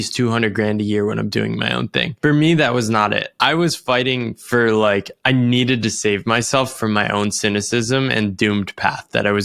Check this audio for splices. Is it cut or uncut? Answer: cut